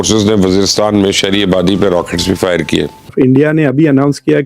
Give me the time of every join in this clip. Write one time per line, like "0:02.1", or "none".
0:03.1